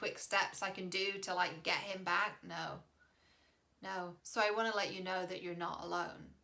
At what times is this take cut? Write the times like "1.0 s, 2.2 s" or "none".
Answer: 4.2 s